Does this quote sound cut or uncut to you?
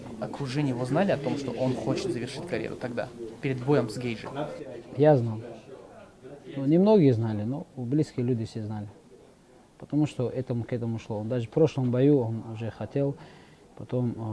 uncut